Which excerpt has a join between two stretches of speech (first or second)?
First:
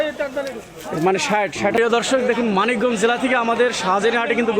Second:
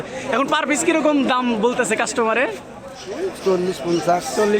first